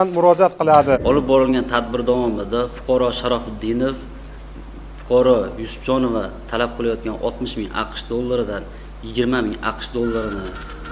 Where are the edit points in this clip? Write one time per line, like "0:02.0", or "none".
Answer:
0:01.0